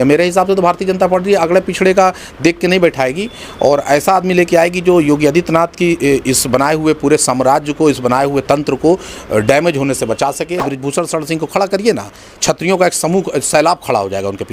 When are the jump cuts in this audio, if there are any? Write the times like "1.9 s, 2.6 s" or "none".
10.6 s